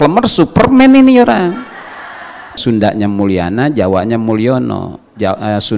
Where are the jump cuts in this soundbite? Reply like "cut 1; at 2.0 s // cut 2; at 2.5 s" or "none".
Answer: cut 1; at 2.6 s

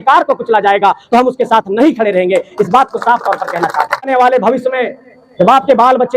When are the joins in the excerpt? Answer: cut 1; at 4.1 s

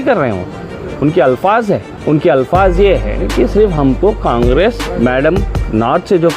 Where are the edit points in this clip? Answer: cut 1; at 1.9 s // cut 2; at 4.8 s

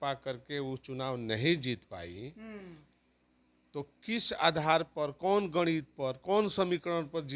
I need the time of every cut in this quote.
none

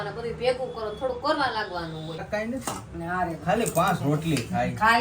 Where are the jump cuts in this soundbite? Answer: cut 1; at 2.3 s

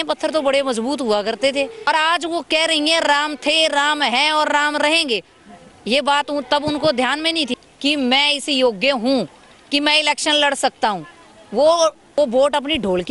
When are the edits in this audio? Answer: cut 1; at 1.9 s // cut 2; at 7.5 s // cut 3; at 12.1 s

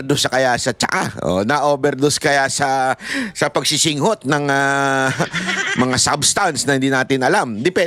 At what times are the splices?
none

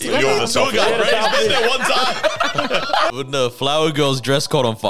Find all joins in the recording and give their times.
cut 1; at 3.1 s

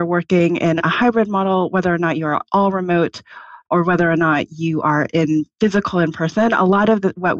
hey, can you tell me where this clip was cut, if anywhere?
none

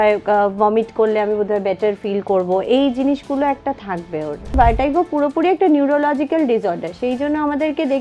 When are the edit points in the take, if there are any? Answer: cut 1; at 4.5 s

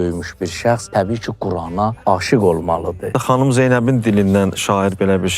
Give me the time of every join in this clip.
cut 1; at 0.8 s // cut 2; at 2.0 s // cut 3; at 3.1 s

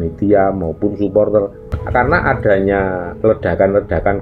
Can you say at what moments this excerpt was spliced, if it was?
cut 1; at 1.8 s

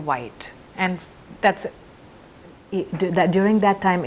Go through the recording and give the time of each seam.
cut 1; at 2.6 s

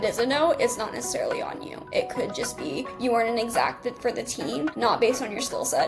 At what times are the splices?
none

